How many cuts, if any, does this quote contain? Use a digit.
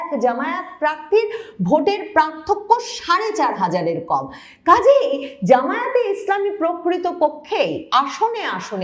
0